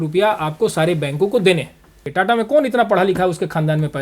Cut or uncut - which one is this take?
cut